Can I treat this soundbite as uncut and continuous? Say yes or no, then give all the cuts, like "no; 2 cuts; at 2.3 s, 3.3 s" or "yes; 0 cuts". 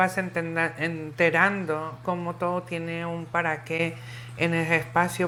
yes; 0 cuts